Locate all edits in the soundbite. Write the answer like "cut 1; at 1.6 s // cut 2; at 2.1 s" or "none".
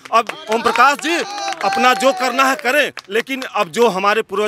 none